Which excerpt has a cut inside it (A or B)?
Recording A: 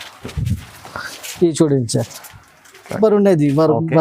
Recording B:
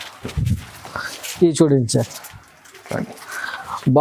A